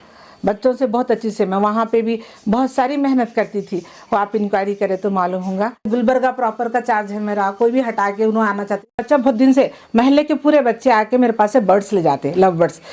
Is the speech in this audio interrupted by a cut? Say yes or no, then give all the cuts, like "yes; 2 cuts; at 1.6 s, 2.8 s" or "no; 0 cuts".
yes; 2 cuts; at 5.9 s, 9.0 s